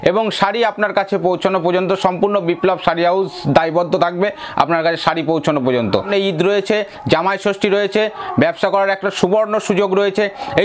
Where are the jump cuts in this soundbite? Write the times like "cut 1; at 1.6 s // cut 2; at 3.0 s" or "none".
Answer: cut 1; at 6.1 s